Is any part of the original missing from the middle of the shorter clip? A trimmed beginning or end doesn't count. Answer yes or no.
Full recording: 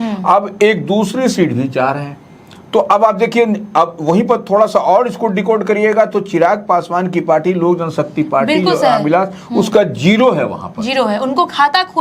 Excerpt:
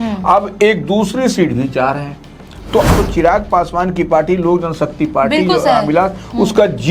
yes